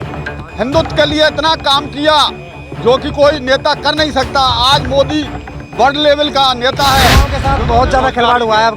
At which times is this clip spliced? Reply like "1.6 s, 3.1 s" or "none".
7.4 s